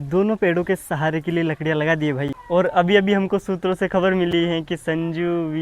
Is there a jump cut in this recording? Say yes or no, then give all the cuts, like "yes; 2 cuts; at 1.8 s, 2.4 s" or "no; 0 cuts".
yes; 1 cut; at 2.4 s